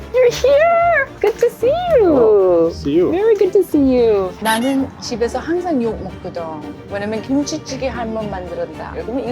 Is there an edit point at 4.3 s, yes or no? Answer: yes